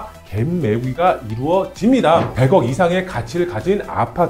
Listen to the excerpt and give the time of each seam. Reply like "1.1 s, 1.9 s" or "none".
2.3 s